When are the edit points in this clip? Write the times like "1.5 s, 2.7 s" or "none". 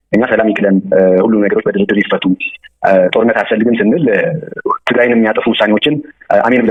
none